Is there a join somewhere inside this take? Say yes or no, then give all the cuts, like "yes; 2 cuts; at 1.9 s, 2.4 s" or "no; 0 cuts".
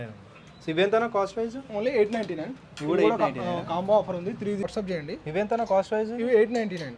yes; 1 cut; at 4.6 s